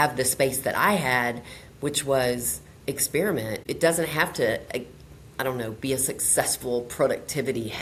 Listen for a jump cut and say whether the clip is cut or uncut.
uncut